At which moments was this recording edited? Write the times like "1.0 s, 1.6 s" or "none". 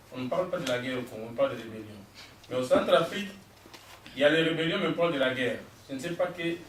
none